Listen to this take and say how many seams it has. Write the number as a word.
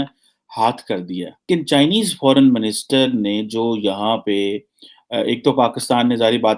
one